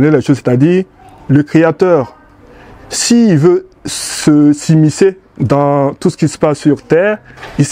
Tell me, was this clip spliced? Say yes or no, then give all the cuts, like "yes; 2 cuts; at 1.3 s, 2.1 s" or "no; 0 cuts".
no; 0 cuts